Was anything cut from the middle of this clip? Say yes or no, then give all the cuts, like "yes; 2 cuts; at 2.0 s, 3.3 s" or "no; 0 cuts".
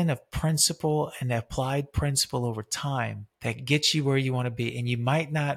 yes; 1 cut; at 3.3 s